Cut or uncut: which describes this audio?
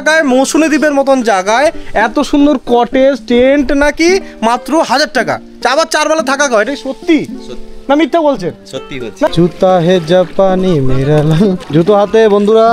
cut